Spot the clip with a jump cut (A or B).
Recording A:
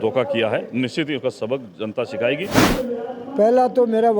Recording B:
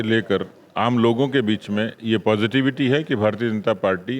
A